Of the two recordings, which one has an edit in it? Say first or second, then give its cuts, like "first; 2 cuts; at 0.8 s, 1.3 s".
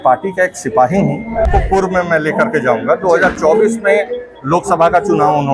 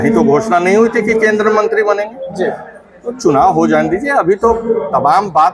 first; 1 cut; at 1.5 s